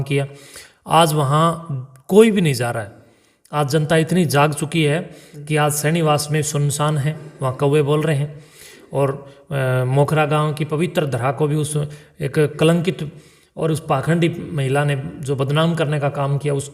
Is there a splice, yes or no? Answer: no